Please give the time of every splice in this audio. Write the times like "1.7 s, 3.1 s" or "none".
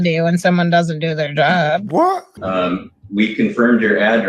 2.3 s